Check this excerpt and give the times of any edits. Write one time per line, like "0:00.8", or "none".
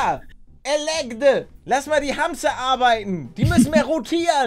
0:01.5